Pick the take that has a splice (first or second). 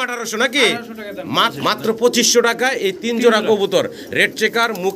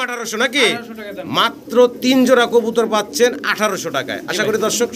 first